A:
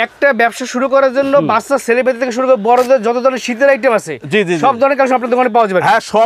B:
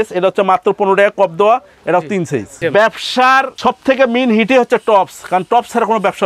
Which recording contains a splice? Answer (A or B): B